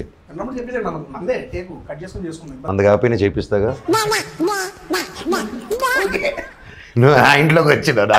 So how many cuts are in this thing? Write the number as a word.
one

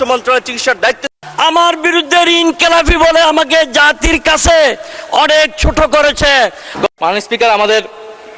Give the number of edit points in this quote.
two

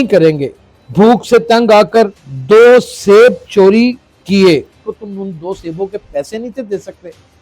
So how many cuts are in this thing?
one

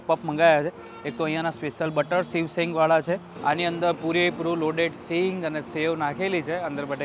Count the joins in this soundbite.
one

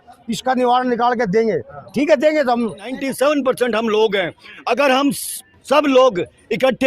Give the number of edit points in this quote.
one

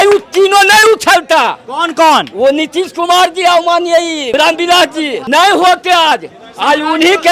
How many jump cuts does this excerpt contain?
two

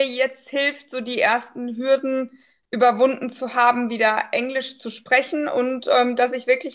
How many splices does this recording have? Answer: zero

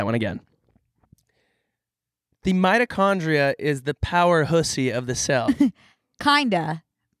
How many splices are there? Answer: zero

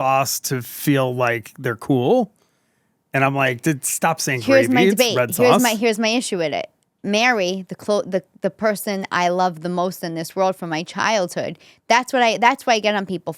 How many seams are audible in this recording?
zero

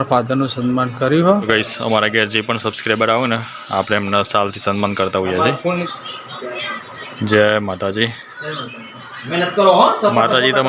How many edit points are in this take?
two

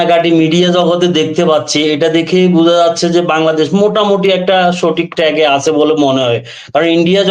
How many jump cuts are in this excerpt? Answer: zero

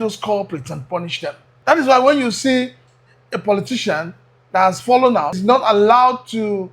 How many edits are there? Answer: two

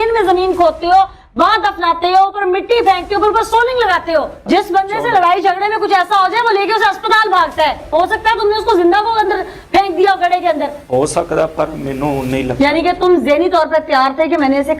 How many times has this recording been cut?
one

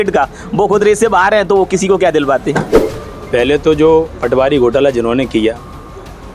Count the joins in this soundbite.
one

